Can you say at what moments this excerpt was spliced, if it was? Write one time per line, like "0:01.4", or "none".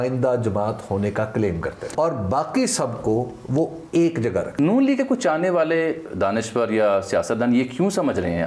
0:01.9
0:04.6